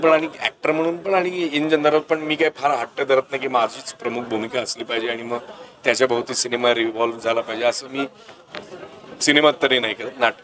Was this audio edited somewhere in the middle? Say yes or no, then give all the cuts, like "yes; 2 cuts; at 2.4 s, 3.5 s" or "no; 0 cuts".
no; 0 cuts